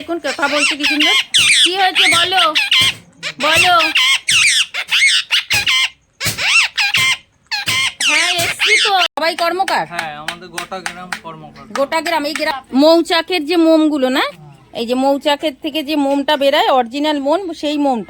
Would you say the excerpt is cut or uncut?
cut